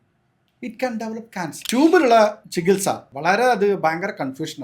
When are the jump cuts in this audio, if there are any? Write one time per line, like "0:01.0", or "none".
0:01.6
0:03.1